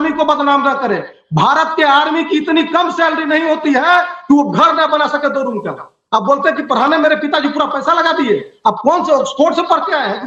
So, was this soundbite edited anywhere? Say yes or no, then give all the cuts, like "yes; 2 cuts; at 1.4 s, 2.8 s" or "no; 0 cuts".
no; 0 cuts